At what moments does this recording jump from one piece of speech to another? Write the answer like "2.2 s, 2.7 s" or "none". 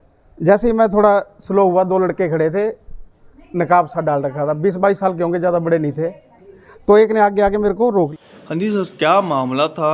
8.1 s